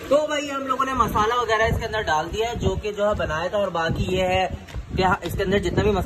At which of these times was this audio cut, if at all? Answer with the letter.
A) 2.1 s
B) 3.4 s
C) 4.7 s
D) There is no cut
D